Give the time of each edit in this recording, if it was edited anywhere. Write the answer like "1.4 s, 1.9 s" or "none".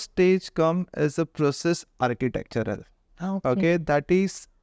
none